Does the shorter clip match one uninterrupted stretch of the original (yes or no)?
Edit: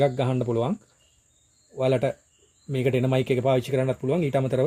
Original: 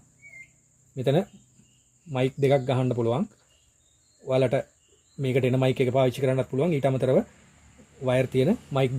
yes